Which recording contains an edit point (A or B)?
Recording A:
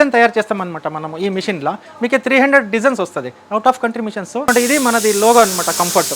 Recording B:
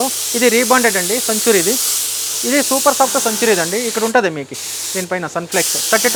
A